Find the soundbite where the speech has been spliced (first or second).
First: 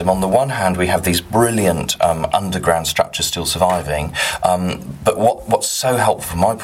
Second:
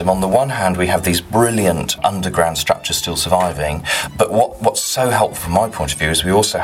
second